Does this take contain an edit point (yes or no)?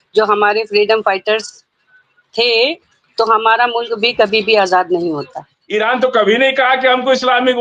yes